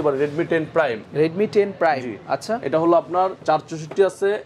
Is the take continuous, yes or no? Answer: yes